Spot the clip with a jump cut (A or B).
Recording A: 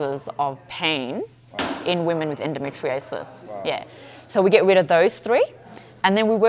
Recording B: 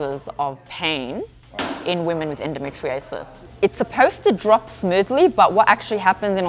B